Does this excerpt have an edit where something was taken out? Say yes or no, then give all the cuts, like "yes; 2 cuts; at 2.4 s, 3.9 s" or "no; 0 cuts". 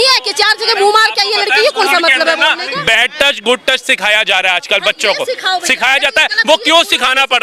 no; 0 cuts